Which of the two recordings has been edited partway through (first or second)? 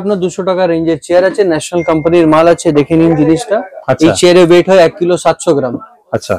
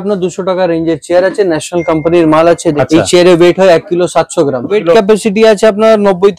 second